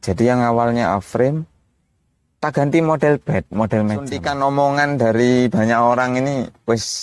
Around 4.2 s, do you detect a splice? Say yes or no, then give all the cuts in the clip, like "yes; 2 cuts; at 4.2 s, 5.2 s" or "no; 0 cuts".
yes; 1 cut; at 4.2 s